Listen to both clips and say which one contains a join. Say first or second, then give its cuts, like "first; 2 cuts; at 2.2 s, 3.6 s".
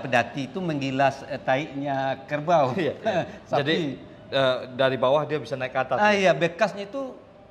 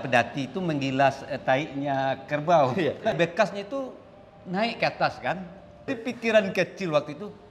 second; 2 cuts; at 3.1 s, 5.9 s